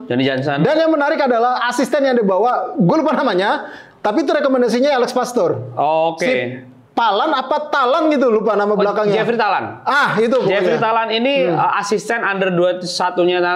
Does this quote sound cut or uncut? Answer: uncut